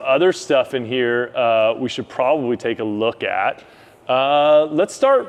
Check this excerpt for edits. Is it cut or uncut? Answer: uncut